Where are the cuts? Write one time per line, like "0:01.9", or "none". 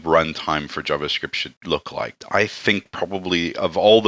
0:01.8